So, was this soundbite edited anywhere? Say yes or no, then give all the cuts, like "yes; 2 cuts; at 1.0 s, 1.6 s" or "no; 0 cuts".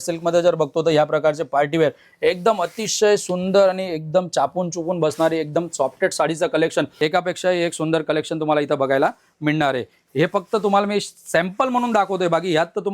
yes; 1 cut; at 6.9 s